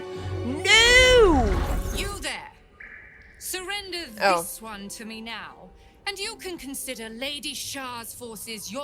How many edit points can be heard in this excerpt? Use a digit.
1